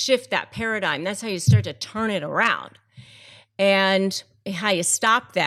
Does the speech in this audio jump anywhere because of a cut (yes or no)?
no